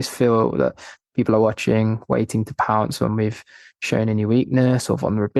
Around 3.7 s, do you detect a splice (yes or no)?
no